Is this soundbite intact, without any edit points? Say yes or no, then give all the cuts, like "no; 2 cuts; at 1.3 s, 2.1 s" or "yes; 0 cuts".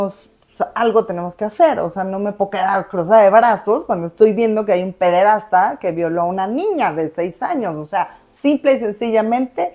yes; 0 cuts